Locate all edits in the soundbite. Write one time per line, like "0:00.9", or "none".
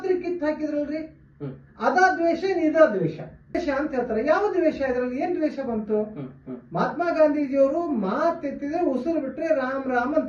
0:03.5